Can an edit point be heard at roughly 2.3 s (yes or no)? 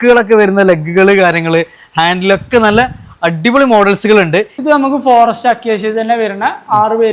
no